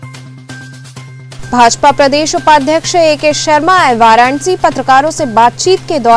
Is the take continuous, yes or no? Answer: no